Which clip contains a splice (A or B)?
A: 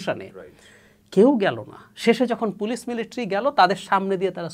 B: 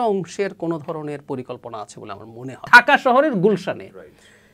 B